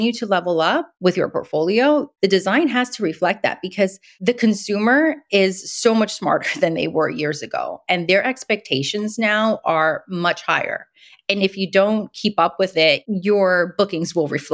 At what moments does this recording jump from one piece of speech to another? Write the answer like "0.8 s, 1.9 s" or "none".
0.9 s, 2.1 s, 4.1 s